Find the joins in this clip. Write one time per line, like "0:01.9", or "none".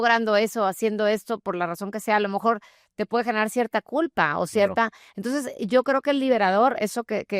none

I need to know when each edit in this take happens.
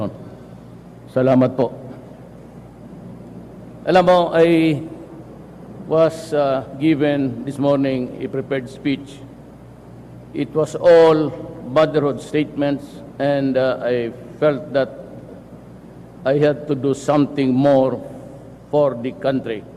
none

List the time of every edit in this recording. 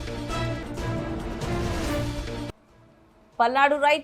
none

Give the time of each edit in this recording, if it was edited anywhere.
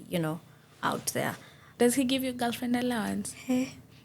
0:01.7

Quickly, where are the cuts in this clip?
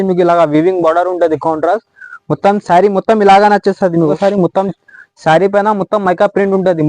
0:04.1

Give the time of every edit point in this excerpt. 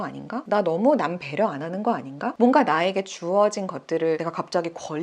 0:02.3

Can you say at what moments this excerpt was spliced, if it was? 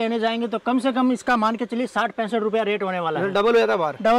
none

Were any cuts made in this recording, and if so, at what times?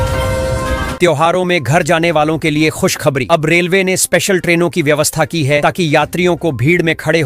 0:01.0

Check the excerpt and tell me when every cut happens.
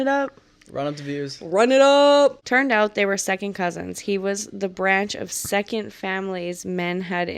0:02.4

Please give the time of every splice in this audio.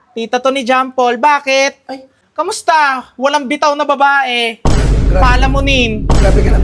0:02.2

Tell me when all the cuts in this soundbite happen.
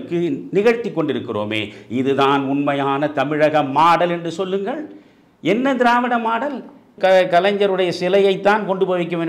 0:06.9

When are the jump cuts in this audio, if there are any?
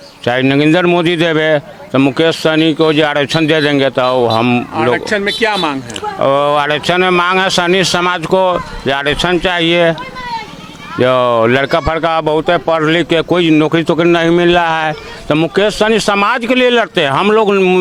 none

